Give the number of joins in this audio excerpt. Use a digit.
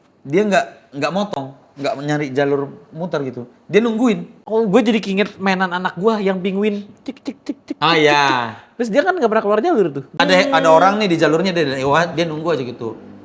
2